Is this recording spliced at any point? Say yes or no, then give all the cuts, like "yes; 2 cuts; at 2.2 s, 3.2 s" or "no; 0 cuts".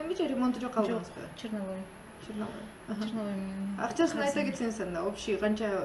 no; 0 cuts